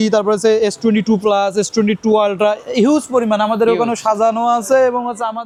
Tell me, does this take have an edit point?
no; 0 cuts

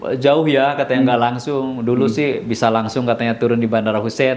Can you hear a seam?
no; 0 cuts

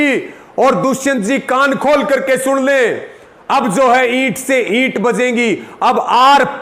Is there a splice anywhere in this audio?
no; 0 cuts

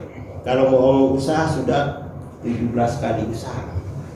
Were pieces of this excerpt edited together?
no; 0 cuts

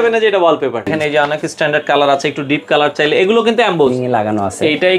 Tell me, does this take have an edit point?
yes; 2 cuts; at 1.0 s, 4.0 s

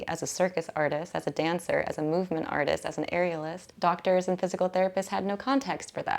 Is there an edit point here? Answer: yes; 1 cut; at 3.6 s

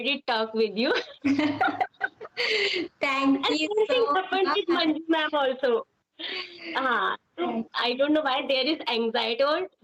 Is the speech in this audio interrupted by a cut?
no; 0 cuts

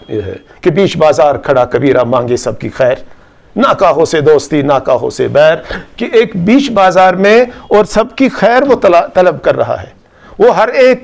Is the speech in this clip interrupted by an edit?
no; 0 cuts

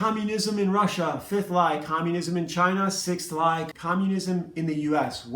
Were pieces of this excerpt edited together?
yes; 1 cut; at 3.7 s

